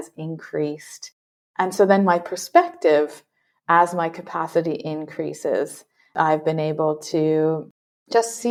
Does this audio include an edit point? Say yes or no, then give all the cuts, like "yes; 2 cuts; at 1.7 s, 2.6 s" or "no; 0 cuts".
no; 0 cuts